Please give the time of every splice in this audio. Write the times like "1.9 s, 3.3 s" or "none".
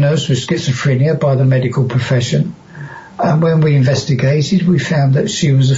none